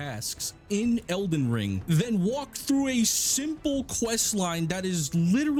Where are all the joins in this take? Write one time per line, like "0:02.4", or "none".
none

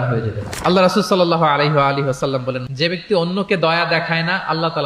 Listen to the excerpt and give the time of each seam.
0:02.6

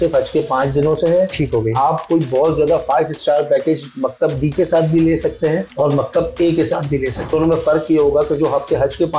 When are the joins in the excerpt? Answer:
0:05.7
0:07.2

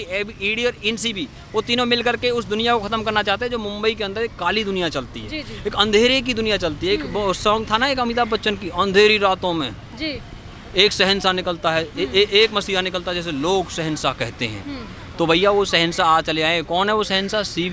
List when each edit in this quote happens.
none

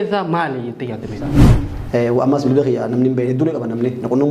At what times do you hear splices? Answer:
0:01.4

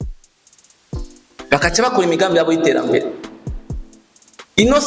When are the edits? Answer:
0:01.3

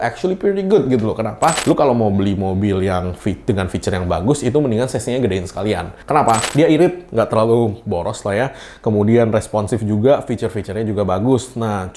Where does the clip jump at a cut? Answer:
0:01.6
0:06.4

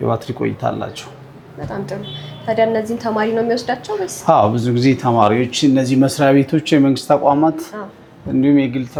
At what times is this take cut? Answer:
none

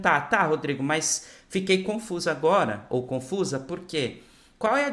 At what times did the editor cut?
none

